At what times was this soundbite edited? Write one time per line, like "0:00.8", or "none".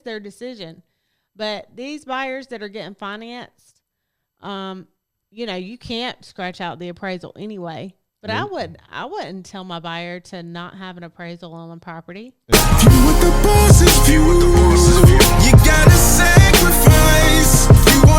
0:12.4